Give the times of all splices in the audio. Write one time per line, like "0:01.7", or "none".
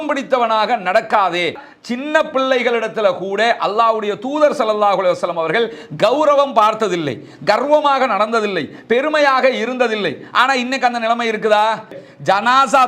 0:01.6
0:12.0